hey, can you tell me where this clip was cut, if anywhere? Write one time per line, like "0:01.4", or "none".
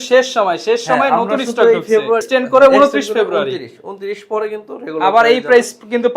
0:02.2